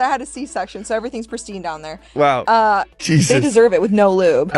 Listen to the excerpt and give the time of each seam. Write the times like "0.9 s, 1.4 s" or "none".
2.8 s